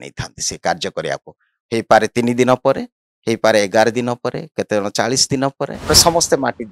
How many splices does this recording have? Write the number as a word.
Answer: one